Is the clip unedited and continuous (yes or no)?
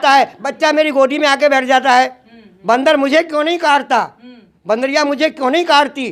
yes